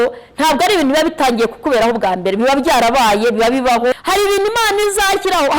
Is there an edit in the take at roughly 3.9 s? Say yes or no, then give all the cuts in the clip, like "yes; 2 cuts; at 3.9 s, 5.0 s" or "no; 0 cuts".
yes; 1 cut; at 3.9 s